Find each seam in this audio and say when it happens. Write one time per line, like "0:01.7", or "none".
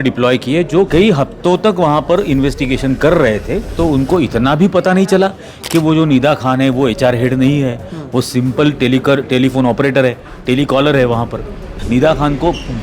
0:00.9
0:03.7
0:11.7